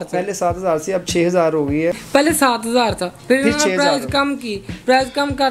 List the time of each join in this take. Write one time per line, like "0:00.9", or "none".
0:02.0

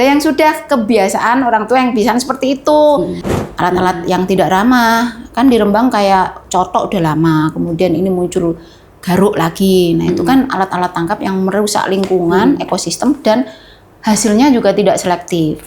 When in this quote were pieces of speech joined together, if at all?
0:03.2

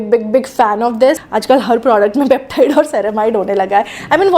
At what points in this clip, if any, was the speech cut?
0:01.3

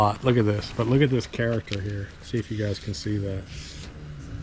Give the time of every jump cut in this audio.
none

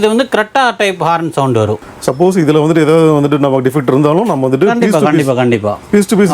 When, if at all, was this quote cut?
0:01.8

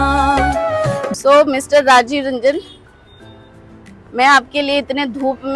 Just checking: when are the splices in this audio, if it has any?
0:01.1

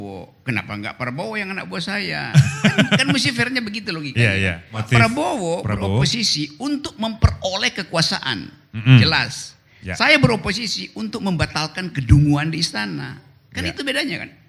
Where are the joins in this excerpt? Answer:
0:04.8

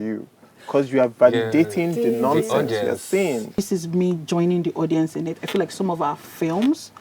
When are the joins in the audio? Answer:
0:03.6

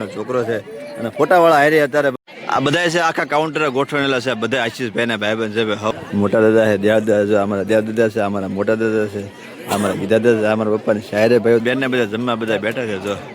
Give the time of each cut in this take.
0:02.1
0:05.9
0:11.6

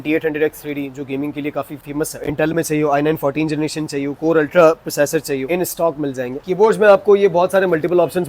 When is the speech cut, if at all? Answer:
0:02.3
0:06.4

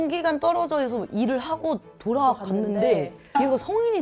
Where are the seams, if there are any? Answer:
none

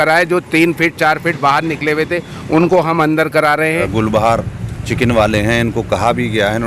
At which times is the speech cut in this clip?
0:03.9

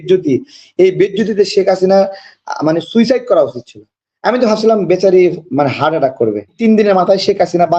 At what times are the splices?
0:06.5

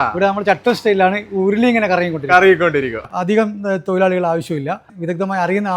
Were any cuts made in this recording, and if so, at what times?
0:03.0
0:04.9

